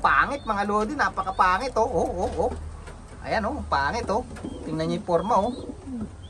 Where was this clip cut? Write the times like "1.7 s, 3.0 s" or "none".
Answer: none

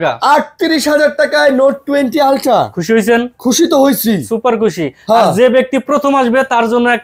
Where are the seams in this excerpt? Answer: none

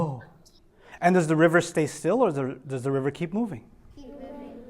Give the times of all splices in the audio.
none

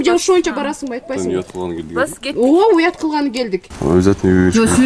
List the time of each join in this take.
3.7 s

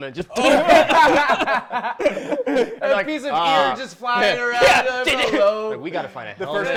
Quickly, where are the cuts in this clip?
none

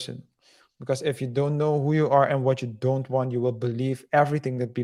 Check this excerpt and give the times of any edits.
none

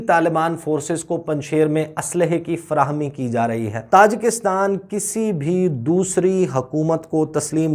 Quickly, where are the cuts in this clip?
3.8 s

